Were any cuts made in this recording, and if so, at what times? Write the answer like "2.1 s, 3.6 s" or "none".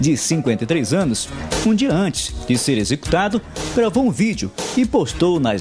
none

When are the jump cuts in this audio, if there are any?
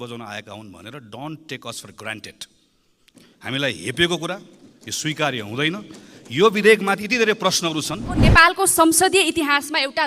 8.2 s

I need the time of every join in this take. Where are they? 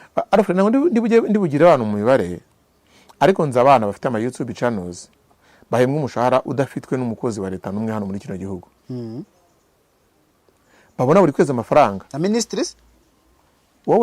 none

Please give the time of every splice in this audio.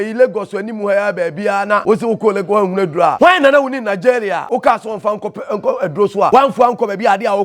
1.8 s, 3.1 s, 4.4 s, 6.3 s

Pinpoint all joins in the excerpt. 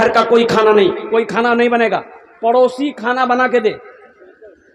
none

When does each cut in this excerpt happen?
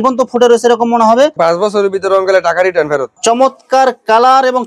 1.3 s, 3.1 s

